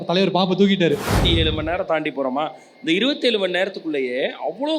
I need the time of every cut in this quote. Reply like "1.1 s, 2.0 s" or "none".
1.2 s